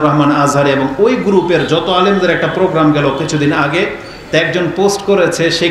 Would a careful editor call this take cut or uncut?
uncut